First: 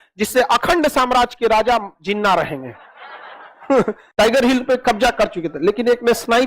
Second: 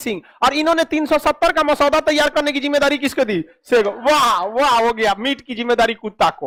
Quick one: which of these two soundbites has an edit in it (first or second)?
first